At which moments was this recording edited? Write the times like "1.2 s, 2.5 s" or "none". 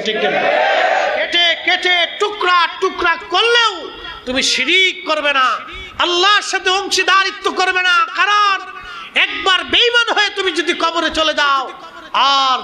1.3 s